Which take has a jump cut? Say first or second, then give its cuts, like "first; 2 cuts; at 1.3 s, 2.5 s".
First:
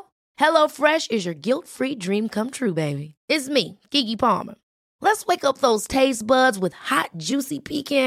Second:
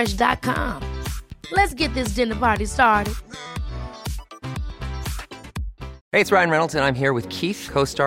second; 1 cut; at 6.0 s